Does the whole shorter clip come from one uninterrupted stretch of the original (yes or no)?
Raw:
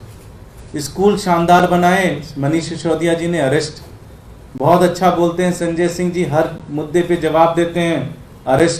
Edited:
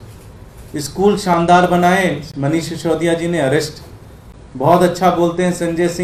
yes